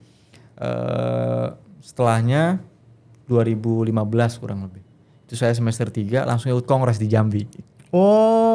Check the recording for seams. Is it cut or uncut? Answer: uncut